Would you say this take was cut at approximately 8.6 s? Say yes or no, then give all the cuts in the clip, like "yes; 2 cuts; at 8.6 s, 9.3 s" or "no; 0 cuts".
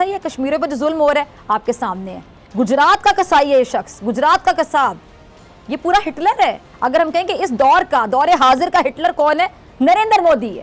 no; 0 cuts